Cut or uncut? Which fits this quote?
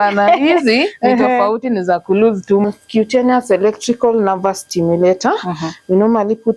cut